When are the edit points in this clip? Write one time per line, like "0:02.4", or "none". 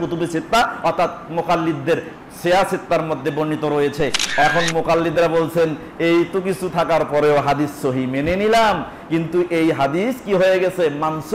0:04.4